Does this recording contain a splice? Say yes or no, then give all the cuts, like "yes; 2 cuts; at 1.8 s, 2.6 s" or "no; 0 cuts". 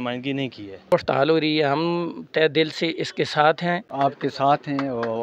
yes; 2 cuts; at 0.9 s, 3.9 s